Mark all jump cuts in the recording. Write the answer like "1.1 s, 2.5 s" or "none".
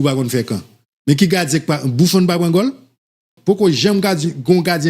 3.3 s